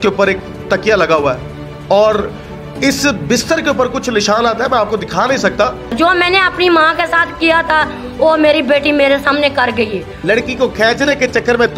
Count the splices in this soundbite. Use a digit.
2